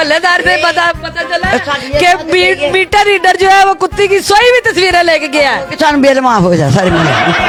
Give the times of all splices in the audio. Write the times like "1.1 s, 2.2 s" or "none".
none

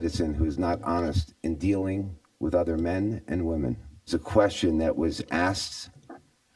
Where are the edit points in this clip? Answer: 4.1 s

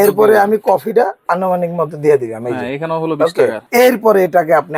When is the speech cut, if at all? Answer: 1.2 s, 3.6 s

